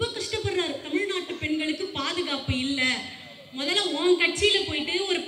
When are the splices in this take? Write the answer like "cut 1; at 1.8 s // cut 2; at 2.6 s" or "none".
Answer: none

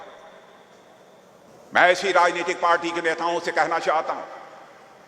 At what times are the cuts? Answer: cut 1; at 1.5 s

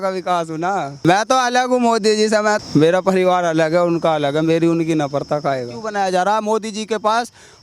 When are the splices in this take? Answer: cut 1; at 1.0 s // cut 2; at 2.6 s // cut 3; at 5.8 s

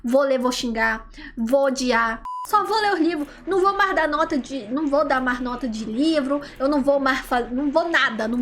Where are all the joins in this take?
cut 1; at 2.3 s

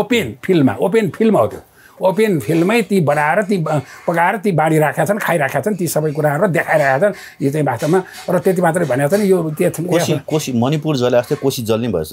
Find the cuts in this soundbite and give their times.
none

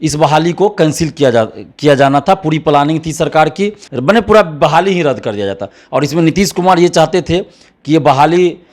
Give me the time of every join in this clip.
cut 1; at 3.9 s

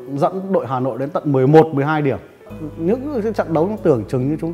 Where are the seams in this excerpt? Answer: cut 1; at 2.4 s

